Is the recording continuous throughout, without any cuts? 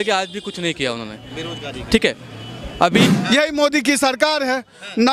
no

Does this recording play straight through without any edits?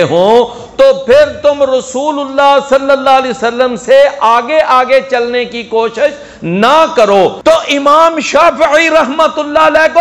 no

